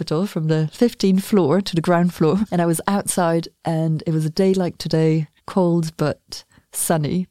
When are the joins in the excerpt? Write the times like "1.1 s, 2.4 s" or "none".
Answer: 2.5 s, 5.4 s